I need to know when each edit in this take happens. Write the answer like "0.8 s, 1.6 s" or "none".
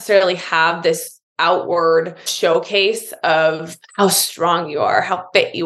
2.3 s

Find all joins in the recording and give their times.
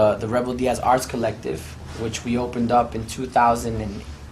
2.9 s

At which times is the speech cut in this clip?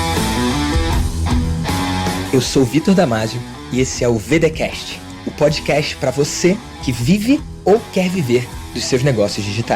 none

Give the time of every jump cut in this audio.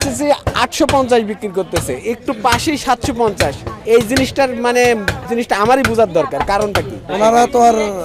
3.7 s, 5.2 s, 7.0 s

